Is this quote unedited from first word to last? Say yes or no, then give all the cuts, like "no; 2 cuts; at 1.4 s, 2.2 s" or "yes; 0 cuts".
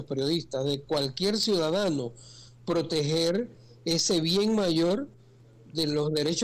yes; 0 cuts